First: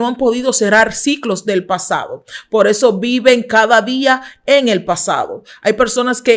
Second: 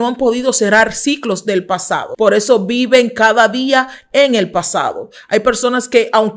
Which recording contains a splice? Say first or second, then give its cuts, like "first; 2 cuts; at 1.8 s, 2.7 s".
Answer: second; 1 cut; at 2.1 s